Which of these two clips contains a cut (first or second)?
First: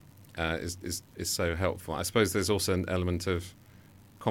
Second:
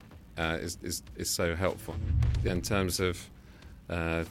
second